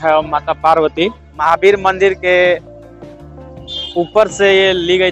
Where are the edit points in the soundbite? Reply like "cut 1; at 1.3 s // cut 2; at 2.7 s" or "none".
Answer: cut 1; at 1.3 s